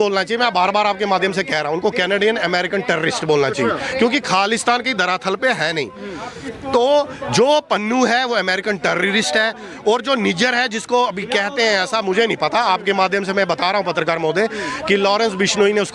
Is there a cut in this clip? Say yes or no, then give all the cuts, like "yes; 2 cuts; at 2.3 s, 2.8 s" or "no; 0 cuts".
no; 0 cuts